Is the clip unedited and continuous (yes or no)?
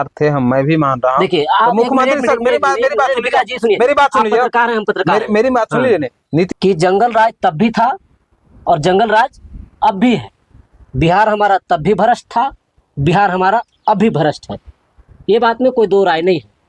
no